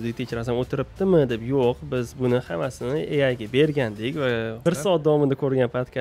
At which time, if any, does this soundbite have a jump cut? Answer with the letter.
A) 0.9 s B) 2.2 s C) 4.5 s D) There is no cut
C